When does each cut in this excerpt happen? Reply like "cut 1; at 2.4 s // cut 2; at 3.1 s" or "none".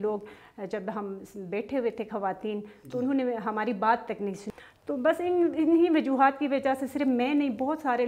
cut 1; at 4.4 s